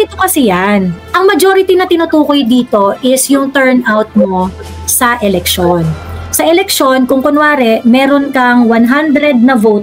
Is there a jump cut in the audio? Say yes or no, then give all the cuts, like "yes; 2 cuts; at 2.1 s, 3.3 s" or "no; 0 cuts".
no; 0 cuts